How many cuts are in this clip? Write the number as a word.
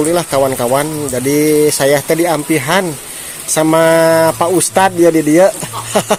zero